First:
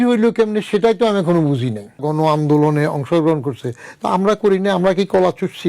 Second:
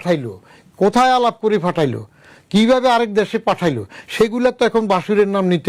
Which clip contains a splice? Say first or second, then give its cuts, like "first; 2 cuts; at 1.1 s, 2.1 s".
first; 1 cut; at 2.0 s